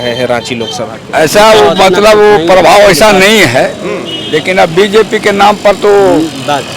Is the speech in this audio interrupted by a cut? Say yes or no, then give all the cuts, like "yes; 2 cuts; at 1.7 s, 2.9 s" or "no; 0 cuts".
yes; 1 cut; at 1.0 s